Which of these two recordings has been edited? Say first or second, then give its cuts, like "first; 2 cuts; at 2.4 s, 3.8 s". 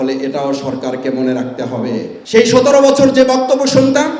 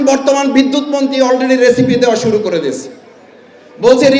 first; 1 cut; at 2.1 s